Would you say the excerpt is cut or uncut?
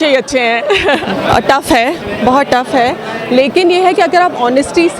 cut